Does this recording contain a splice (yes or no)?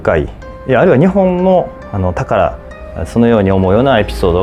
no